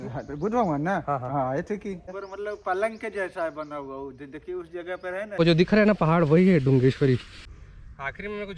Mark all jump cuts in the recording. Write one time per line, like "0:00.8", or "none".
0:02.2
0:05.4
0:07.4

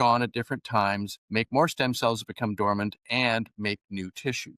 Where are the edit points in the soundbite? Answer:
0:01.2

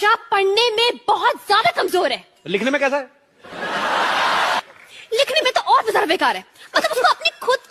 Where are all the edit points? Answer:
none

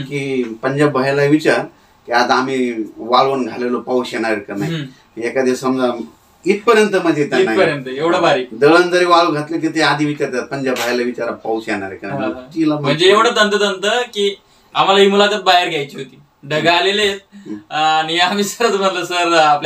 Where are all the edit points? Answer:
none

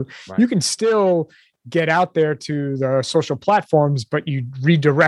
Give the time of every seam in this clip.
none

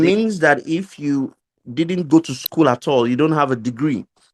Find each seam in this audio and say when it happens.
none

